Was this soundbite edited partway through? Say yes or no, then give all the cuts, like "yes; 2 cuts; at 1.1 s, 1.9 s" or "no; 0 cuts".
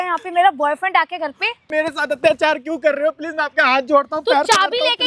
yes; 1 cut; at 1.7 s